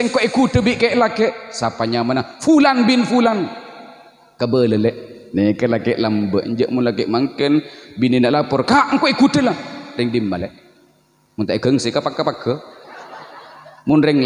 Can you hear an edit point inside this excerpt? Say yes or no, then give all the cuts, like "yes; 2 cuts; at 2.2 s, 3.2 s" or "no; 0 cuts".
no; 0 cuts